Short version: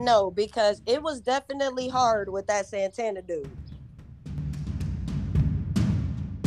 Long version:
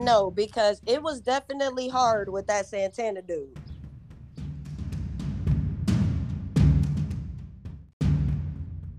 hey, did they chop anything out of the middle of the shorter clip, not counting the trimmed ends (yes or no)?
yes